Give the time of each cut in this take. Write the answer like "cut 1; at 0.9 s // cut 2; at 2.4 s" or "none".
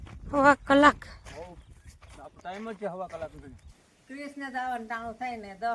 cut 1; at 3.7 s